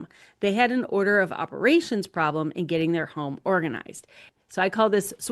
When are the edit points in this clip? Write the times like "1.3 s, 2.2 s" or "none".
4.2 s